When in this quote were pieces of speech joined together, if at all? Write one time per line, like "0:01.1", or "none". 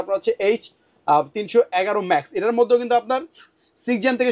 none